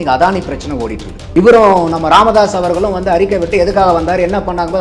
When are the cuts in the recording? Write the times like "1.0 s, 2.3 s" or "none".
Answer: 1.2 s